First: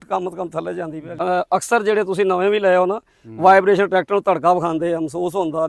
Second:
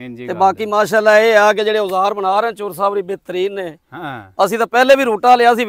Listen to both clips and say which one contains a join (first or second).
first